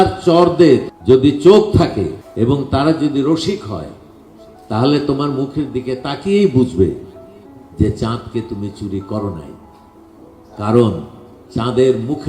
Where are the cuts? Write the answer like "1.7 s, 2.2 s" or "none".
0.9 s, 2.2 s